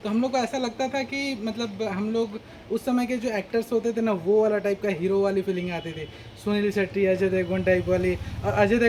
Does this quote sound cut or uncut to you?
uncut